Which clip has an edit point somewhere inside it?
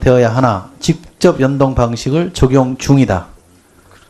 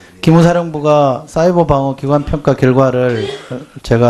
first; 1 cut; at 3.0 s

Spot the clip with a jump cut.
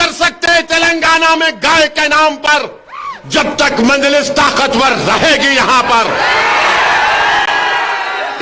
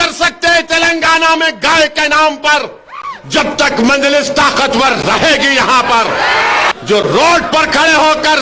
second; 1 cut; at 6.7 s

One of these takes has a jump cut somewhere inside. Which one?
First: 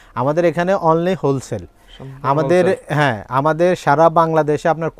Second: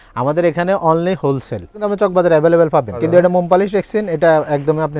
second; 2 cuts; at 1.8 s, 3.0 s

